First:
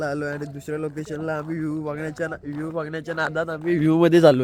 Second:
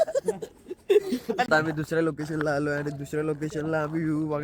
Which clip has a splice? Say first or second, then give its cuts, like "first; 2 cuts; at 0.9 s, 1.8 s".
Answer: second; 1 cut; at 1.5 s